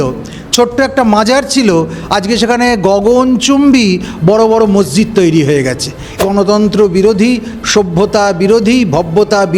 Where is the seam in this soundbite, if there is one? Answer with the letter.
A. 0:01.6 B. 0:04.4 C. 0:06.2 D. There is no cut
C